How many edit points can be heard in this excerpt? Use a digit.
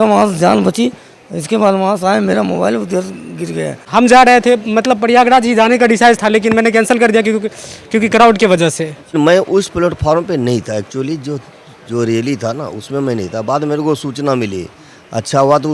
2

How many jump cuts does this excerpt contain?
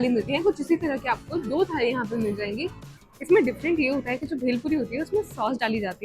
1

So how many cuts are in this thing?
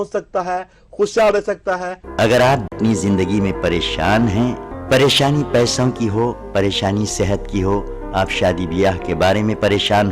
2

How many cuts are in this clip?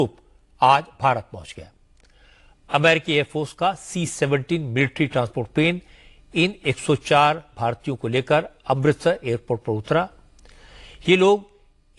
0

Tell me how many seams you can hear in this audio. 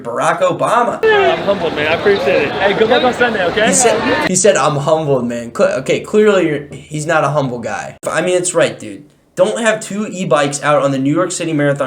2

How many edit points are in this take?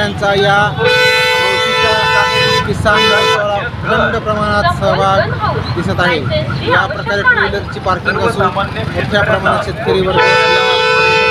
0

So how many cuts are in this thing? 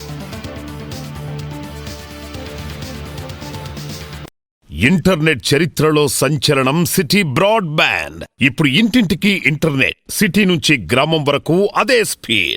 1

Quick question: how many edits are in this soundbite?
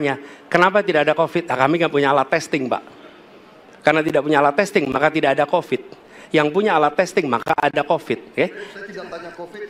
0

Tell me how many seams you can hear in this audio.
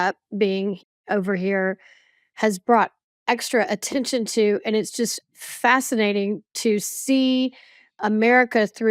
0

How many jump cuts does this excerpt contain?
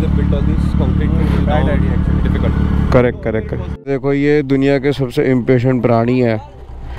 1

